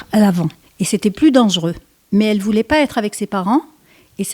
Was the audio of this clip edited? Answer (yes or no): yes